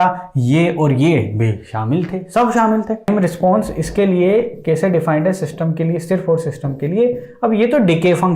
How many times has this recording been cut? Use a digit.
1